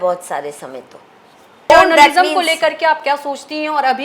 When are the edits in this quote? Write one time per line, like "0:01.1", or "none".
0:01.7